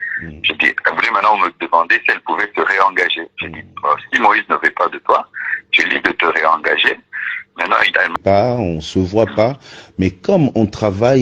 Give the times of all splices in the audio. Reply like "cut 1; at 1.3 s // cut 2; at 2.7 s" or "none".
cut 1; at 8.1 s

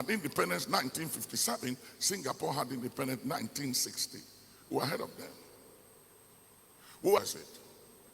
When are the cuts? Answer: cut 1; at 7.2 s

